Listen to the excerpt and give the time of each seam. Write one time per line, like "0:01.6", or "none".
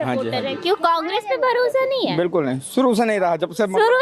none

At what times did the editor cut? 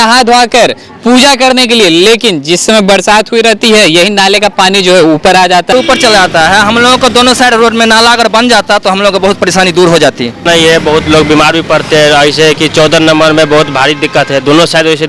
0:05.7
0:10.4

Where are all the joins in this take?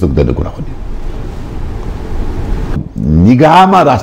0:02.8

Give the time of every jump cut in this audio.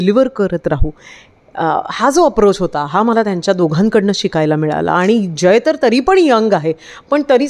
none

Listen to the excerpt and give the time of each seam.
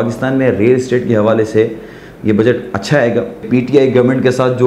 0:03.5

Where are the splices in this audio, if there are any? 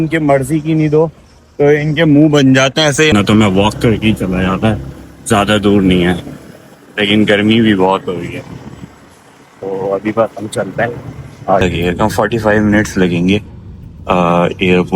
0:03.1
0:11.6

